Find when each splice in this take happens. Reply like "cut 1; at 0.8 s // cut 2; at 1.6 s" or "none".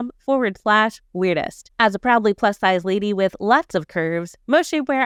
none